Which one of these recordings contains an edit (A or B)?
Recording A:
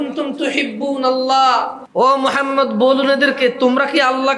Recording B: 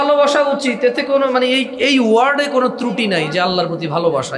A